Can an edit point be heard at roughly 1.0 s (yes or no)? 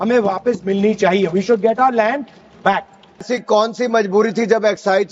no